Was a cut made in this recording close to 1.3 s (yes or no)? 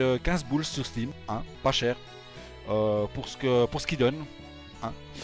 yes